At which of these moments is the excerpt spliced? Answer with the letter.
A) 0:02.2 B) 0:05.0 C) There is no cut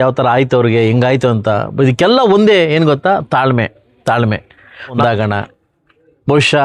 B